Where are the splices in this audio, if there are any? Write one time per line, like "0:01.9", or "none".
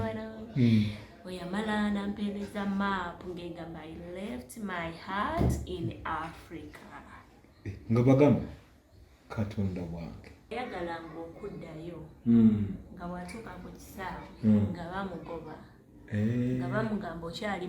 0:10.5